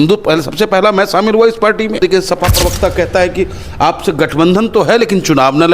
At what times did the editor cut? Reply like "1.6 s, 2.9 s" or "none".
2.0 s